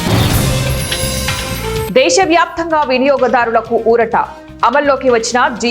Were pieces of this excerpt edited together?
yes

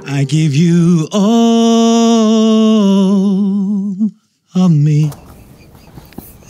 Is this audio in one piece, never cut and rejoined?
yes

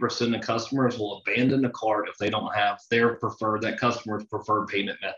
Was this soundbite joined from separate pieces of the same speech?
no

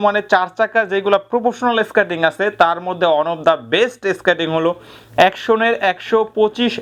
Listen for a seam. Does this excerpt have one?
no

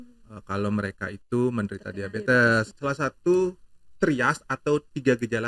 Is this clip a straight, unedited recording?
no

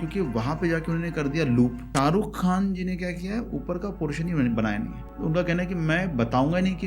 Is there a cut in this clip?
yes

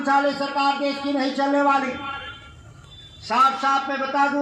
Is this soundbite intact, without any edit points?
yes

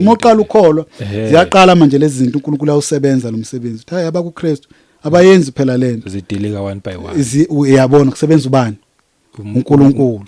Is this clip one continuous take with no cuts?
yes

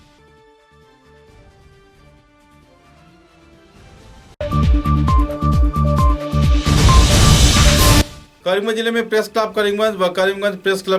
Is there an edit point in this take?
no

